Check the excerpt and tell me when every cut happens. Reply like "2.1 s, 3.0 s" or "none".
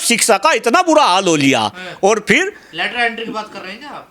none